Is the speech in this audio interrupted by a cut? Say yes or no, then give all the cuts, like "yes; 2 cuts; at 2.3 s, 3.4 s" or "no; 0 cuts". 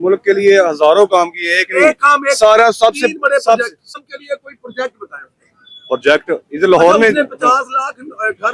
yes; 1 cut; at 3.9 s